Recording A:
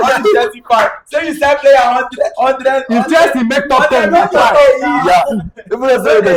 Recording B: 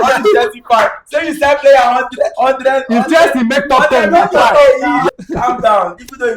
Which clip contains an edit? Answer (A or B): B